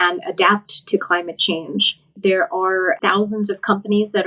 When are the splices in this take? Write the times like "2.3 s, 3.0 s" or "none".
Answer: 2.1 s, 3.0 s